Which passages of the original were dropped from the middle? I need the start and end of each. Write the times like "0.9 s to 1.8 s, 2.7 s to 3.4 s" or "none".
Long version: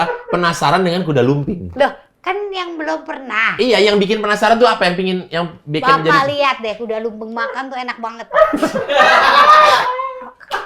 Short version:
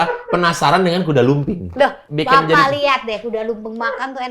2.0 s to 5.6 s